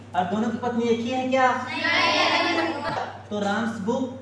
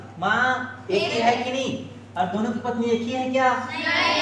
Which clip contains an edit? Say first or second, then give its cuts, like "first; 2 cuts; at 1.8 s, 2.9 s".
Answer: first; 1 cut; at 3.1 s